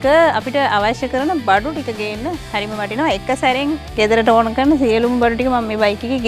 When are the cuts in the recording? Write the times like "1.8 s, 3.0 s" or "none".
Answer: none